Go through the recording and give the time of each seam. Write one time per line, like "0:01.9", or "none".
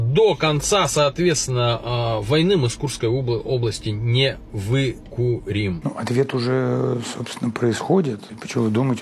0:05.8